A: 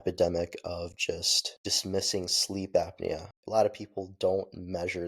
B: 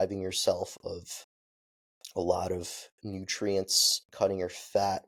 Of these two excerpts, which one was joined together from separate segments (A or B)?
A